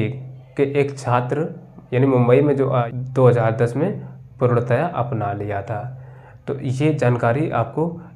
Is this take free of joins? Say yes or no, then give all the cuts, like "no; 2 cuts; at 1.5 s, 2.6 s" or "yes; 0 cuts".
no; 1 cut; at 2.9 s